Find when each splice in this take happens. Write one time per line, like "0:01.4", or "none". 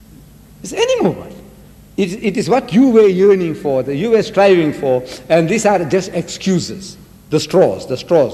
0:03.6